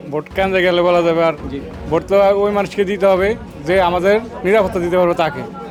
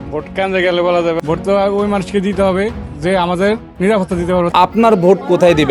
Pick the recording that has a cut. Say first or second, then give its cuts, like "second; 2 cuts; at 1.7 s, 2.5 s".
second; 2 cuts; at 1.2 s, 4.5 s